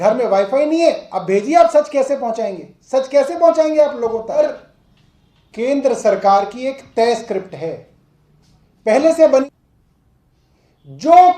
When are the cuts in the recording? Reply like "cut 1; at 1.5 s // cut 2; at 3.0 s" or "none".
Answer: cut 1; at 4.4 s // cut 2; at 9.4 s